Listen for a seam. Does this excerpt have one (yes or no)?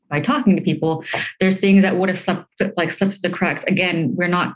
no